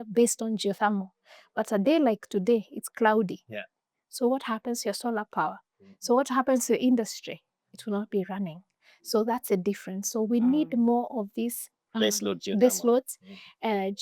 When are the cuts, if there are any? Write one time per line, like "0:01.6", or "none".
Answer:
none